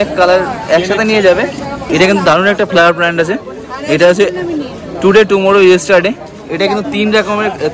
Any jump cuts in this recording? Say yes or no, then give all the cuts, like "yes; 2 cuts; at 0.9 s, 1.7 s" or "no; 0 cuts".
yes; 1 cut; at 1.9 s